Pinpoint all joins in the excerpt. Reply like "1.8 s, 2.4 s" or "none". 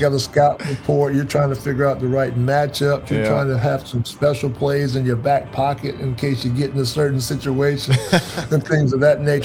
none